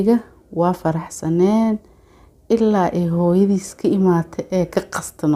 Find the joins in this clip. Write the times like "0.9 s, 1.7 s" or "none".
none